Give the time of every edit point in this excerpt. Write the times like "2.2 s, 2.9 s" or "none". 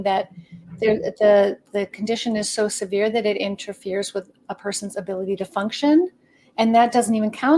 none